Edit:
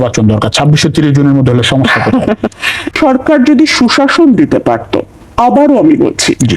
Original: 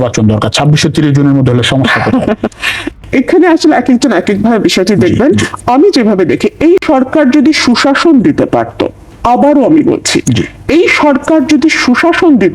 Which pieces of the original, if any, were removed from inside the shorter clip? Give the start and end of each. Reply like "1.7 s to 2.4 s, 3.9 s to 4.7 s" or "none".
3.0 s to 6.8 s